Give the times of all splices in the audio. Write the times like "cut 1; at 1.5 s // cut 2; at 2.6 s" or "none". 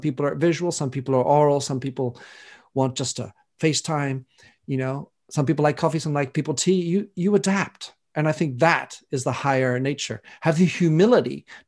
none